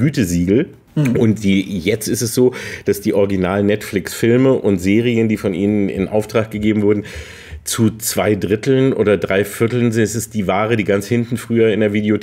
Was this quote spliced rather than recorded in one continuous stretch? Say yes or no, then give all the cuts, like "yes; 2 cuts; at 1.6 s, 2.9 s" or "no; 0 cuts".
no; 0 cuts